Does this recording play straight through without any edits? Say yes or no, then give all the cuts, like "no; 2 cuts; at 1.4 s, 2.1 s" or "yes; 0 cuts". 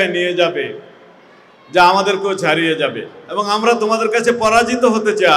yes; 0 cuts